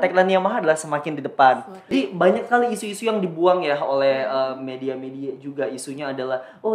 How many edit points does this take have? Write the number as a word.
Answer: one